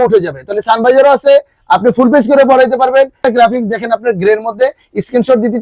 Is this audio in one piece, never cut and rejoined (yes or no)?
no